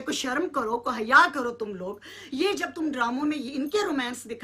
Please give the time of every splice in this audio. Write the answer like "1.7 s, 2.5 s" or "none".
none